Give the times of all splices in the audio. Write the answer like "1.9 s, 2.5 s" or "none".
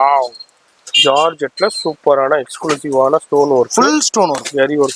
none